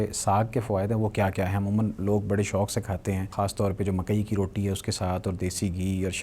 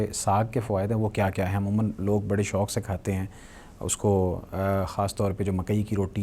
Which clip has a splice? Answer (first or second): first